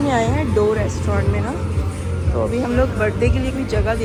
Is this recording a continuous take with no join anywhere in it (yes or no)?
yes